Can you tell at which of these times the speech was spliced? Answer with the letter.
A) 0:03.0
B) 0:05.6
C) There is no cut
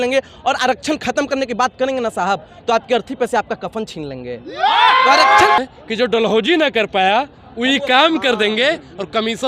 B